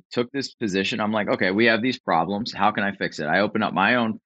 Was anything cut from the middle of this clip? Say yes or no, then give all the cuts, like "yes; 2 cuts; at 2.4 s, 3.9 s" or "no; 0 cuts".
no; 0 cuts